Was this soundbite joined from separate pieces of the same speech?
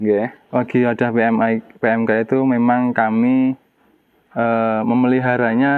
no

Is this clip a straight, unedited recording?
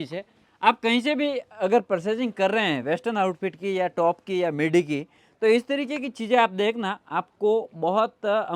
yes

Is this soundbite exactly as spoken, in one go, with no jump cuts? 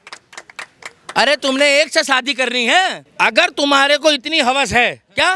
no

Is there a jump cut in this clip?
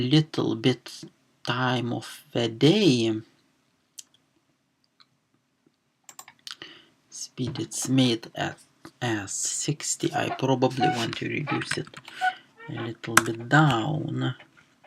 no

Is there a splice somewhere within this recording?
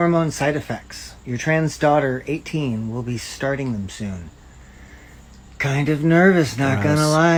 no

